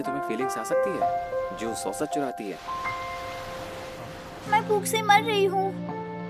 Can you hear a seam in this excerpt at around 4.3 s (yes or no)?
yes